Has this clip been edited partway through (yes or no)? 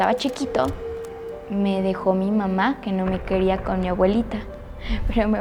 no